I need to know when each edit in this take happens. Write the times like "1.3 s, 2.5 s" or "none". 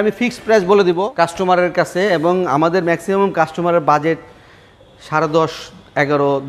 1.1 s